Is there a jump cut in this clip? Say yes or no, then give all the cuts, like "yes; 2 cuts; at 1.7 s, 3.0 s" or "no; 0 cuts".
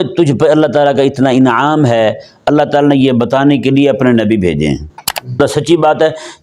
yes; 1 cut; at 5.4 s